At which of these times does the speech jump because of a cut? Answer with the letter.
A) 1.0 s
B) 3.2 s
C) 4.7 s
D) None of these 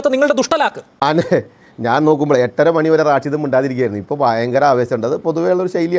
A